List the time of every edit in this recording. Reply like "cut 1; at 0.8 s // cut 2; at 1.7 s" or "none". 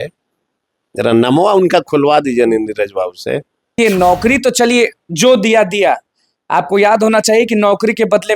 cut 1; at 3.7 s